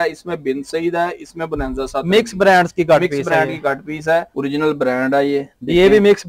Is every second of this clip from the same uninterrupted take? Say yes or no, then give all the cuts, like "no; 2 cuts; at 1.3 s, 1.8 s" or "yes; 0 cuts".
no; 1 cut; at 4.3 s